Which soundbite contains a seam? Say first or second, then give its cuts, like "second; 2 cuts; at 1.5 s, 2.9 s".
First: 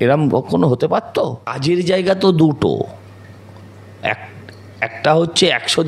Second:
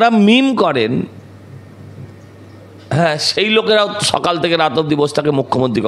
first; 1 cut; at 1.5 s